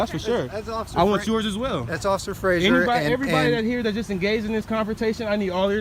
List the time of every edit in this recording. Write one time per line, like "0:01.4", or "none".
none